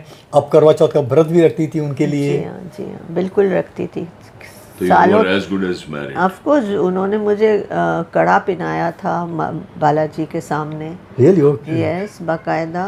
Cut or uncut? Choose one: uncut